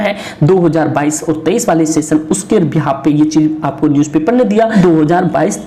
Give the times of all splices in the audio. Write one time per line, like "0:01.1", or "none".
0:04.7